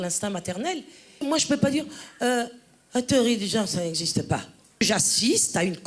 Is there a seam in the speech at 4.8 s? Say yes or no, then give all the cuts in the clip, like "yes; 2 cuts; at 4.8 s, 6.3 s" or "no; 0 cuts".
yes; 2 cuts; at 1.2 s, 4.8 s